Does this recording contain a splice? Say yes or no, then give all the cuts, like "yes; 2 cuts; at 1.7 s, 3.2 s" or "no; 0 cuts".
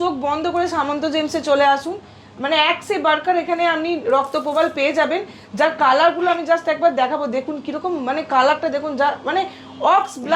no; 0 cuts